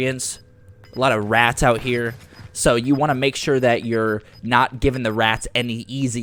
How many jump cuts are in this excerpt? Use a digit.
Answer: 0